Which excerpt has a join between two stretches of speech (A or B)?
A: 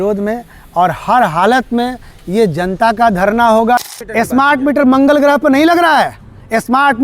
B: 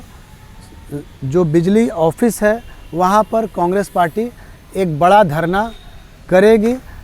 A